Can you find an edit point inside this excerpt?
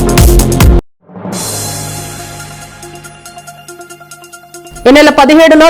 yes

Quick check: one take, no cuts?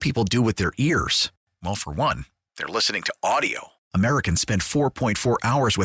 yes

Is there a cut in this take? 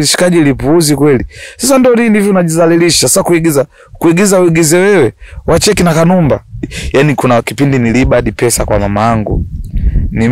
yes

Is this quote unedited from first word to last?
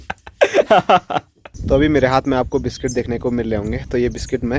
no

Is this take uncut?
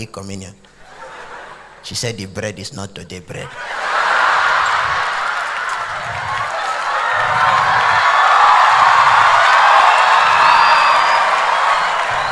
yes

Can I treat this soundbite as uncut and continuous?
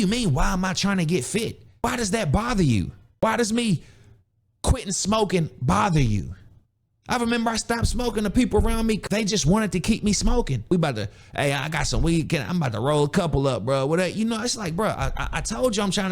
no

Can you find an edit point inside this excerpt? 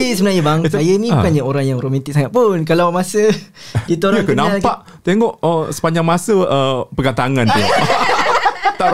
no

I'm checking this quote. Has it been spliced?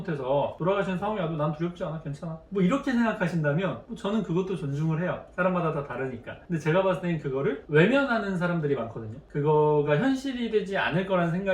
no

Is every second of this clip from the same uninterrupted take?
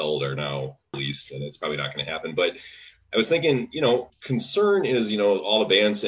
no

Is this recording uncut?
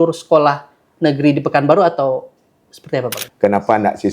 no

